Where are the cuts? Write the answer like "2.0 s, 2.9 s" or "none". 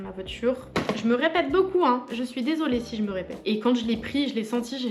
0.7 s, 3.3 s